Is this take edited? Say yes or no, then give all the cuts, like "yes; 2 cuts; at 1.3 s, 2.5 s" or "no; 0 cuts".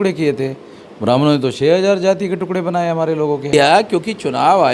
yes; 1 cut; at 3.5 s